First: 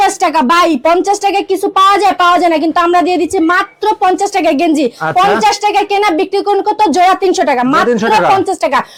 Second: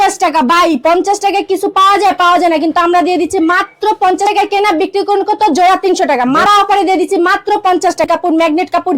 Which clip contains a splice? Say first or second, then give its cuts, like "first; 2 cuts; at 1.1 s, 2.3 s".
second; 3 cuts; at 4.2 s, 6.5 s, 8.1 s